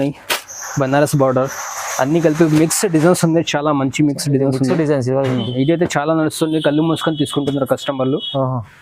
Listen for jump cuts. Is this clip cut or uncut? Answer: uncut